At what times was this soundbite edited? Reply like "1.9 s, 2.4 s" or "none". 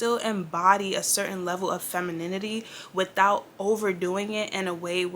none